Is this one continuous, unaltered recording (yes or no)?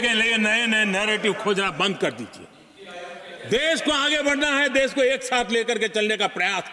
yes